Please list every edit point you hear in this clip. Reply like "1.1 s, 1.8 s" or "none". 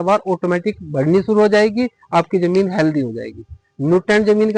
none